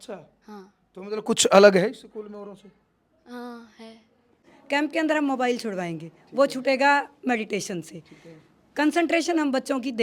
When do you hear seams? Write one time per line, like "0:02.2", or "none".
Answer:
0:04.6